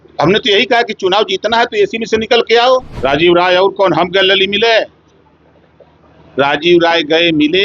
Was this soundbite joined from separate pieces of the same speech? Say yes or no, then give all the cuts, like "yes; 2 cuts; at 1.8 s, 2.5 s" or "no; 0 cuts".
yes; 1 cut; at 2.9 s